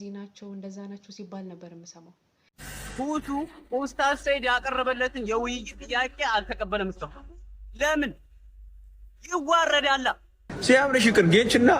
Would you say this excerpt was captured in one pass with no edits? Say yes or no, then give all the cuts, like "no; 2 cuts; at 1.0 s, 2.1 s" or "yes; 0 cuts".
no; 2 cuts; at 2.6 s, 10.5 s